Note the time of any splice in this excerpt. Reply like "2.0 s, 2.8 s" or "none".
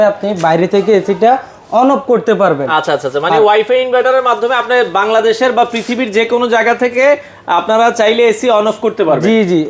none